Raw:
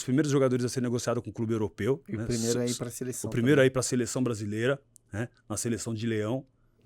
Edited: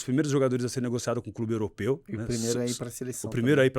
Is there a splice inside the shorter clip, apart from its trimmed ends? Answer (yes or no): no